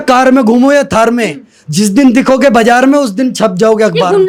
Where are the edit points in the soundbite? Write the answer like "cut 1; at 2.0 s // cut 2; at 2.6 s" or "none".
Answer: none

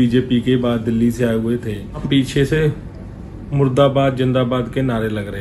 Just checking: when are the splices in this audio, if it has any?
cut 1; at 2.0 s

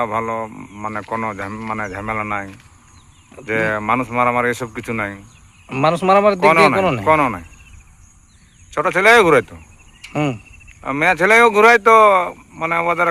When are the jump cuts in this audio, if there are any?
none

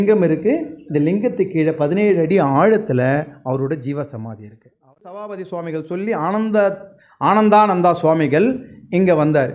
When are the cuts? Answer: none

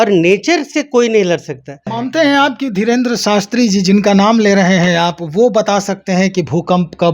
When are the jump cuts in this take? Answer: cut 1; at 2.0 s

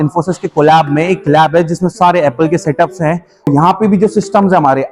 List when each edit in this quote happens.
cut 1; at 3.5 s

